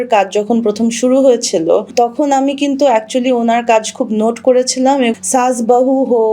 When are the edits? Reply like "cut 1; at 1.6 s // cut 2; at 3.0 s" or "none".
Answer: cut 1; at 1.9 s // cut 2; at 5.2 s